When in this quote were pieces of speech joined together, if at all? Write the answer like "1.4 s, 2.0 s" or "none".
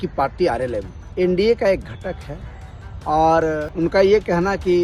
1.0 s, 3.7 s

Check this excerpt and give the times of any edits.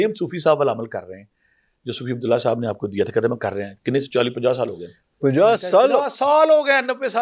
none

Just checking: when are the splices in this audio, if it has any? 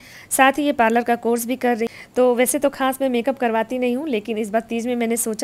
1.9 s

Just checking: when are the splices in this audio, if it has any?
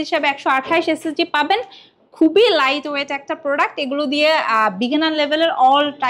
none

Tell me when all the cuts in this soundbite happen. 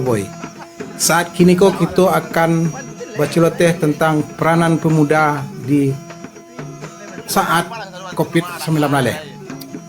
1.3 s

